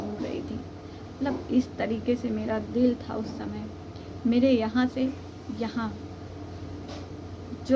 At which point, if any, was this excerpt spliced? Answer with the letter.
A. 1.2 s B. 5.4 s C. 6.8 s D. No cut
D